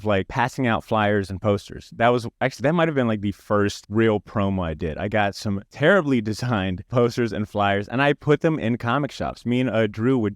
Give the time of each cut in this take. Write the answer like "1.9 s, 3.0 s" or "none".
none